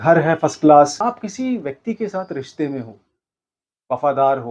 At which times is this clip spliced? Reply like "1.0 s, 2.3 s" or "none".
1.1 s